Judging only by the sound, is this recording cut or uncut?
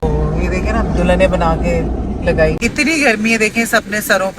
cut